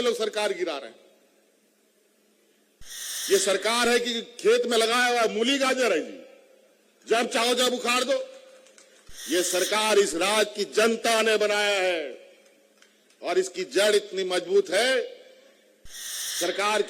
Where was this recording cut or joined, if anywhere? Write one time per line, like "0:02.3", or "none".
0:02.8